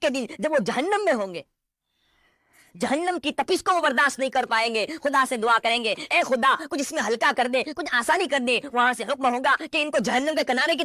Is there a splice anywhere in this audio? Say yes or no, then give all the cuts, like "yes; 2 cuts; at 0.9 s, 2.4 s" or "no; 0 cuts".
no; 0 cuts